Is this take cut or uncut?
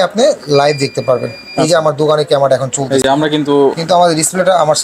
uncut